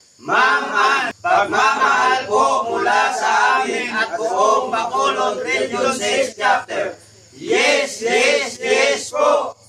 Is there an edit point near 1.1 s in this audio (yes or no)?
yes